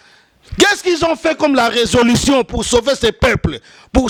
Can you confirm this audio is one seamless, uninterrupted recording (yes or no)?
yes